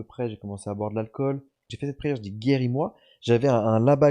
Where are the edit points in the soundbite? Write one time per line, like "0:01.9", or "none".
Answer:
0:01.7